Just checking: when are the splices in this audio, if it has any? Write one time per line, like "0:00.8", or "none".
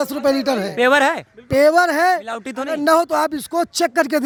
none